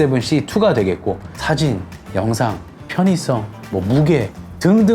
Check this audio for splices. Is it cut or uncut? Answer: cut